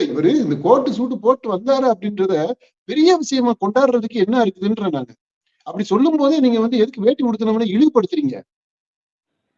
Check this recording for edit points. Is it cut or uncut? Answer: uncut